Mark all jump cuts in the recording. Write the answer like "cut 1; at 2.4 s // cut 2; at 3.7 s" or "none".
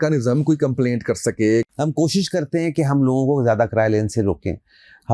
cut 1; at 1.7 s